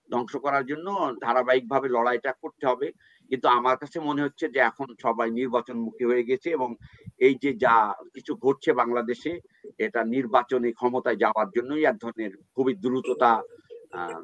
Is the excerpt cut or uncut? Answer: uncut